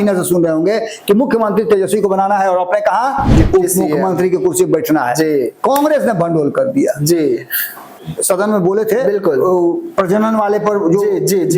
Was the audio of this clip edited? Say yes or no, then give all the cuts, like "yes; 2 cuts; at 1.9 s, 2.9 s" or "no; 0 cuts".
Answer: yes; 1 cut; at 8.1 s